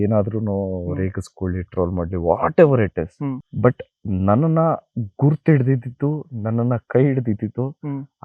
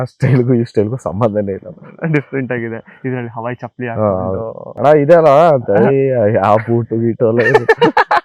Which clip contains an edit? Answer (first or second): second